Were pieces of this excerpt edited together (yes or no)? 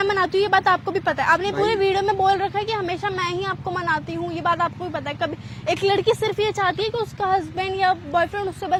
no